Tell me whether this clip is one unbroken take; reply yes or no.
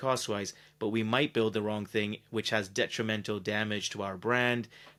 yes